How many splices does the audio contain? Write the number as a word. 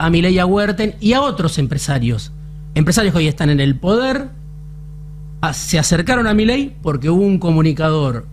zero